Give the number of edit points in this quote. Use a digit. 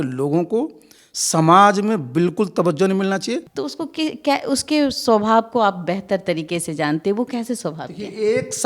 1